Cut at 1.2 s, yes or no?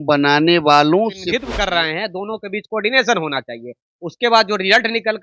yes